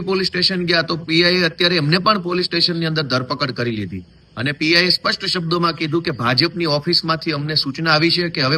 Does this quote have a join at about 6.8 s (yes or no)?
no